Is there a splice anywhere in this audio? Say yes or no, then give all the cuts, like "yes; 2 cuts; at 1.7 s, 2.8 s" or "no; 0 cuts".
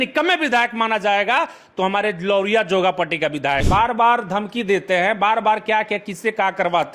yes; 1 cut; at 3.6 s